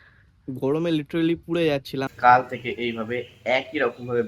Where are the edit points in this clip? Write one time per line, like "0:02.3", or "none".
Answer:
0:02.1